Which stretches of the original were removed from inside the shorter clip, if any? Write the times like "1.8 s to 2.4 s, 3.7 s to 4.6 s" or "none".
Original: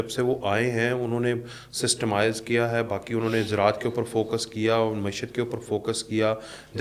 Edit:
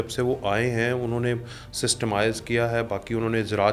none